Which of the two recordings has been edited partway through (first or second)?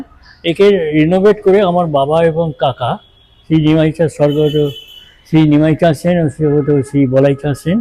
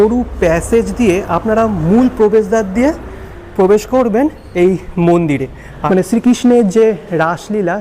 second